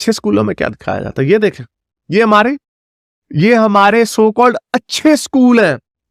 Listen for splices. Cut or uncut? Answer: uncut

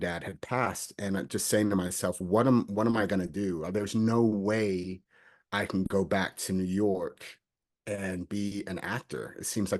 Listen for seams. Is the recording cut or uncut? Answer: uncut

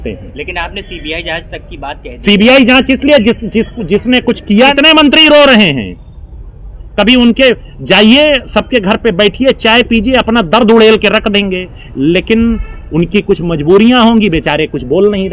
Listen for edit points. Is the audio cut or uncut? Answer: cut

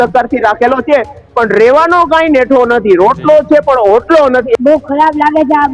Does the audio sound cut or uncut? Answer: cut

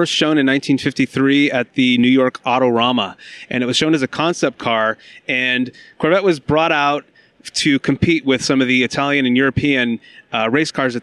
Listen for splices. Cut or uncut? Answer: cut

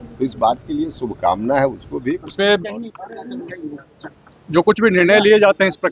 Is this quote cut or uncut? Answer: cut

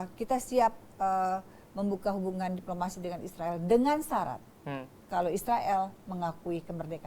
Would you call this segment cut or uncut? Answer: uncut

